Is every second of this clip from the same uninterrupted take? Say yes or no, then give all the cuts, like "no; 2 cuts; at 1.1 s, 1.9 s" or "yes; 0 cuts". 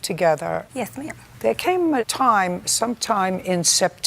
no; 1 cut; at 0.9 s